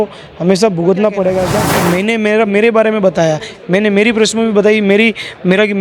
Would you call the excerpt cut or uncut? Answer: cut